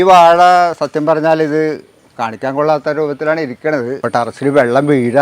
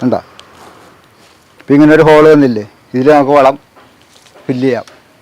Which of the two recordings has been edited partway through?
first; 1 cut; at 4.0 s

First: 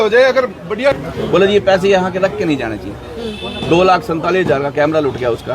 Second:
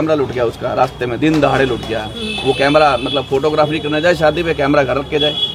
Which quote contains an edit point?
first; 1 cut; at 0.9 s

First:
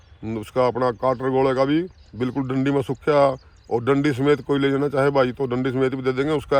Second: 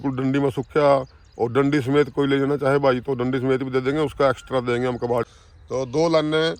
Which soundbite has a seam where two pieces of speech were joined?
second; 1 cut; at 5.3 s

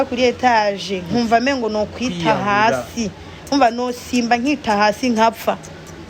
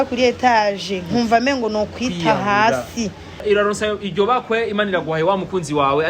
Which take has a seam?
second; 1 cut; at 3.4 s

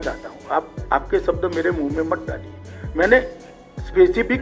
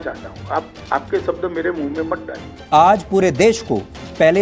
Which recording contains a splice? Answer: second; 1 cut; at 2.6 s

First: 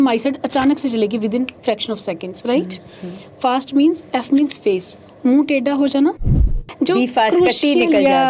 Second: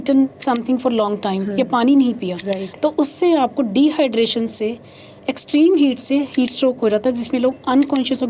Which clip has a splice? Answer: first; 1 cut; at 6.6 s

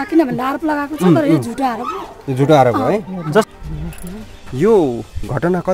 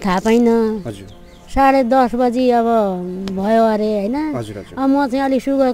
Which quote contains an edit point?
first; 1 cut; at 3.5 s

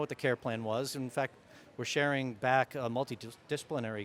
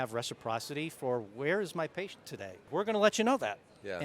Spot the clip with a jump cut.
second; 1 cut; at 2.7 s

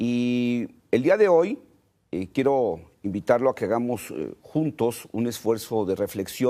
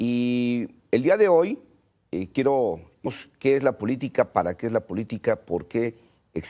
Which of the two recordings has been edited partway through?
first; 1 cut; at 3.1 s

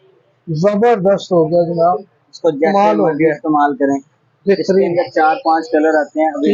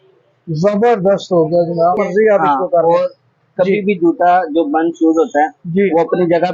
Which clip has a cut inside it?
second; 1 cut; at 2.0 s

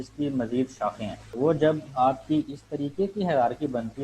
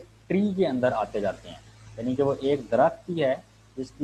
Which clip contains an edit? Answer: first; 1 cut; at 1.2 s

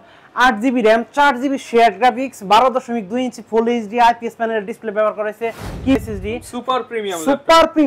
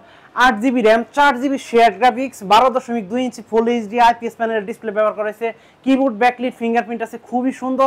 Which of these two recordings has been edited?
first; 1 cut; at 6.0 s

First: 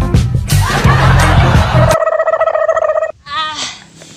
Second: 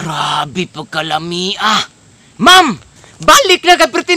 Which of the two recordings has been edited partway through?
first; 2 cuts; at 1.9 s, 3.2 s

